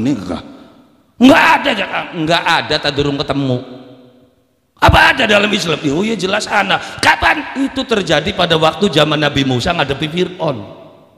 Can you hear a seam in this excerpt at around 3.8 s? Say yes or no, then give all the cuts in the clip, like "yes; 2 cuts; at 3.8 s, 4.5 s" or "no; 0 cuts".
no; 0 cuts